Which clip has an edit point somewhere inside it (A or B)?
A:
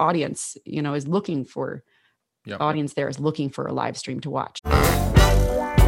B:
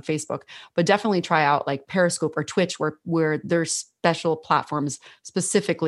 A